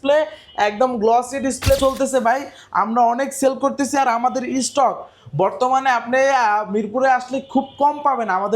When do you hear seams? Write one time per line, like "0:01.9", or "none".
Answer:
0:01.8